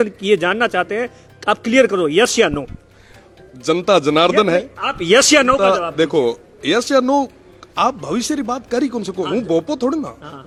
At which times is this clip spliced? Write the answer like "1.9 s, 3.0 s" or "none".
none